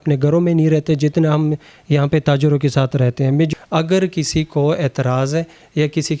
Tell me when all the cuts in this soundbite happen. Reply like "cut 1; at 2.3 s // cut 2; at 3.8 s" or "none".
cut 1; at 3.5 s